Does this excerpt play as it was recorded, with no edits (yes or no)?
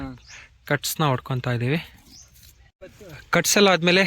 no